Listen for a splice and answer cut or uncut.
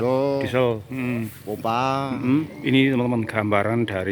cut